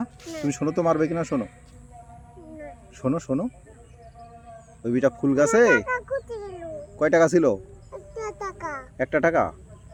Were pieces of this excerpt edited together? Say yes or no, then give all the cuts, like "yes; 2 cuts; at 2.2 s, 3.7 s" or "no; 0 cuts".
no; 0 cuts